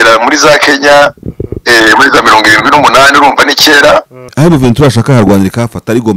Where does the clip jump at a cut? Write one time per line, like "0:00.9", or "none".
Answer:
0:04.2